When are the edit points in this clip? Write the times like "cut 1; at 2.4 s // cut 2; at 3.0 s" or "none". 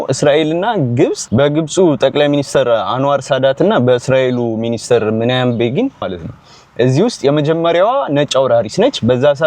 cut 1; at 6.0 s